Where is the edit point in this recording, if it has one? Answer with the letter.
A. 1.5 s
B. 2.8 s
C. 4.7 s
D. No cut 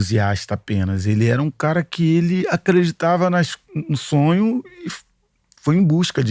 D